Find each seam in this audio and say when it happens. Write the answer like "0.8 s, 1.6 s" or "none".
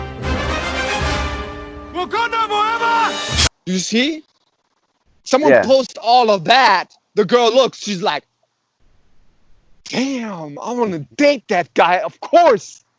none